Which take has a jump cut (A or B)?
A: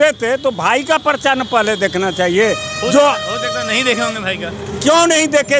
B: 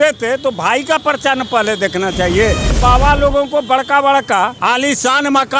B